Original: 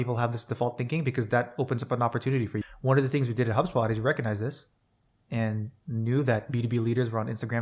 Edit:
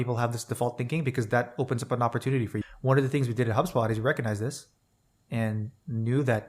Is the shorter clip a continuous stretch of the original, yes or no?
yes